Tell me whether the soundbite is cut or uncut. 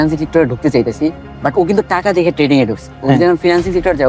uncut